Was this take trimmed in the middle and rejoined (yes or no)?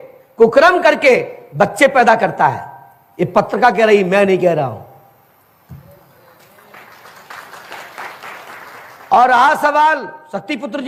no